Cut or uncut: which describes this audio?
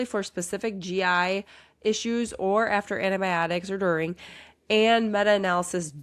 uncut